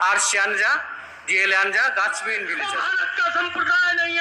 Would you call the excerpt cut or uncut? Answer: cut